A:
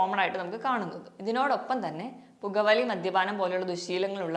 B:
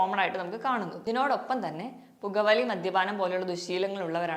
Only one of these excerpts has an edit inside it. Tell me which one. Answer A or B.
B